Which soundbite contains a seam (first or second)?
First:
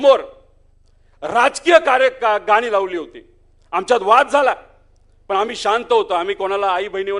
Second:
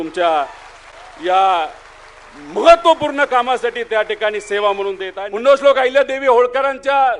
second